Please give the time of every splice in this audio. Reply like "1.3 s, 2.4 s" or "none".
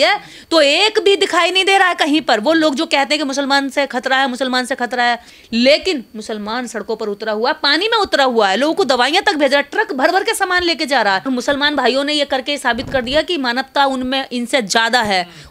5.3 s, 11.3 s